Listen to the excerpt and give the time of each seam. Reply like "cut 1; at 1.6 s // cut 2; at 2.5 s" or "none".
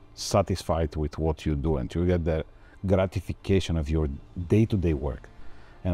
none

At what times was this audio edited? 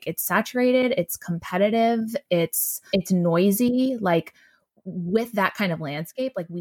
cut 1; at 2.7 s

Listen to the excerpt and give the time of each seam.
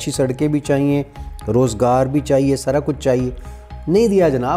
none

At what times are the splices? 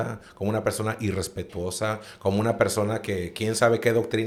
none

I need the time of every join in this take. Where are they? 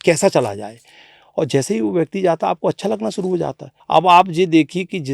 cut 1; at 3.7 s

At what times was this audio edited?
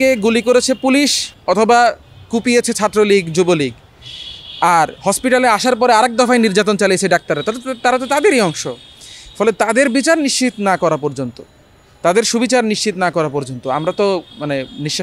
cut 1; at 1.3 s

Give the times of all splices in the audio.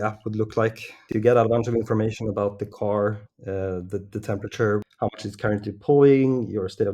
cut 1; at 1.1 s // cut 2; at 4.8 s

